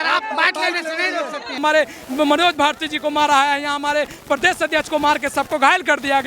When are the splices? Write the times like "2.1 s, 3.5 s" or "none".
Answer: 1.6 s